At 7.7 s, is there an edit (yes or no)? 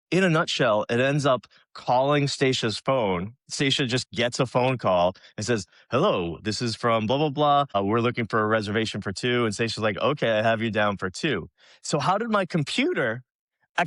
yes